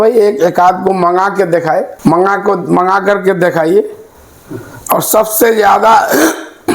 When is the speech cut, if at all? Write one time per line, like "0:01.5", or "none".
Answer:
none

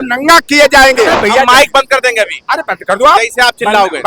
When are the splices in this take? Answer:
0:01.2

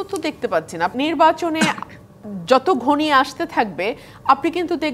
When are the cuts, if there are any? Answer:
0:00.9

